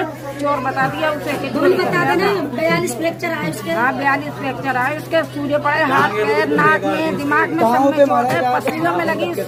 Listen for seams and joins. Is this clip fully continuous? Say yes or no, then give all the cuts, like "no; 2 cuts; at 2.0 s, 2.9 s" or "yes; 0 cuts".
yes; 0 cuts